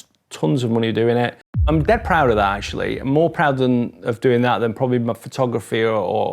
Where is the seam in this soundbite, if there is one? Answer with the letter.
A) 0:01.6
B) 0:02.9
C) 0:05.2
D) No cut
A